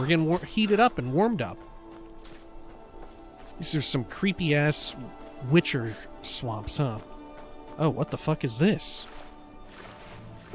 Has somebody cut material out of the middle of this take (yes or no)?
yes